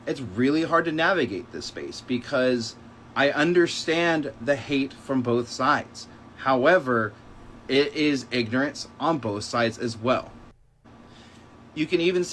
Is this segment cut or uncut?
uncut